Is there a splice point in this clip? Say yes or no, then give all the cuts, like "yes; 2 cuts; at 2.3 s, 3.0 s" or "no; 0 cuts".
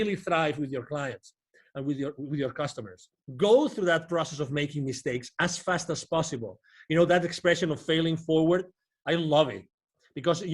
yes; 1 cut; at 3.2 s